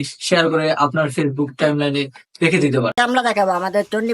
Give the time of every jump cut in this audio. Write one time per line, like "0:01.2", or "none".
0:02.9

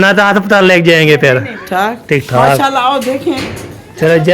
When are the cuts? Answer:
0:01.6

